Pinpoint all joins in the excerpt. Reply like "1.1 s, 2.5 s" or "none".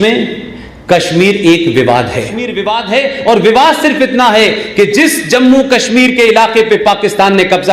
2.6 s